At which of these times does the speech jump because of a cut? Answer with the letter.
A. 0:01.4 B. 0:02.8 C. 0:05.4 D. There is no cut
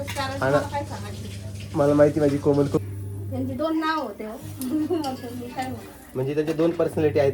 B